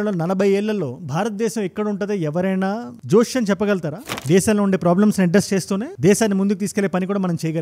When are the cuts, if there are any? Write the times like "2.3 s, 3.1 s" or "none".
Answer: 4.1 s